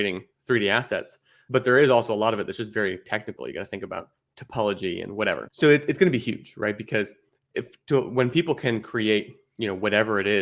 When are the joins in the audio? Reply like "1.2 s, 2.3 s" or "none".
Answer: 1.3 s, 5.5 s